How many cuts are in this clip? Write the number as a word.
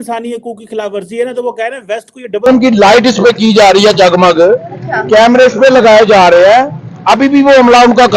one